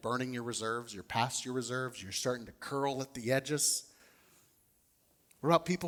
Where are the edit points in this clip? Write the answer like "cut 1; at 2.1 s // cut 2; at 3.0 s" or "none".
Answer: none